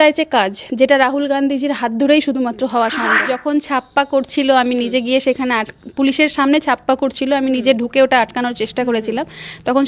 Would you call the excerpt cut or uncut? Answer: cut